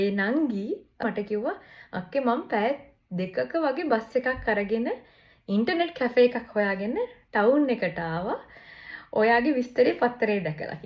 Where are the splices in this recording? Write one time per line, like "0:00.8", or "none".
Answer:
0:01.0